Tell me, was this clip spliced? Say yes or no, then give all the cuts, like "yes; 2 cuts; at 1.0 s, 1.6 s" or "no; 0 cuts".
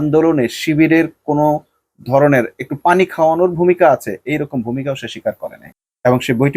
no; 0 cuts